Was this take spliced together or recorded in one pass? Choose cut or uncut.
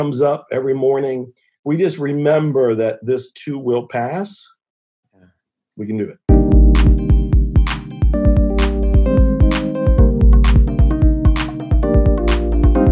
cut